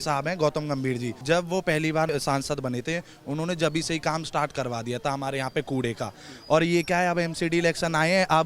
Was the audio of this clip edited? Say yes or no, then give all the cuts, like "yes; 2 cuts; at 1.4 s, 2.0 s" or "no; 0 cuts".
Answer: yes; 2 cuts; at 1.1 s, 2.1 s